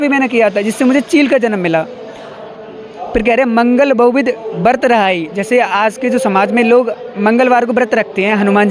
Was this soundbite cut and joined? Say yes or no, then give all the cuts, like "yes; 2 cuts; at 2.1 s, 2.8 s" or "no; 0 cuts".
no; 0 cuts